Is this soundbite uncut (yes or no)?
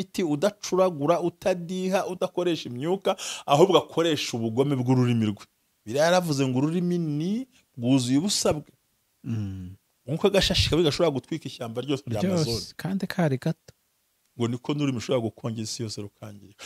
yes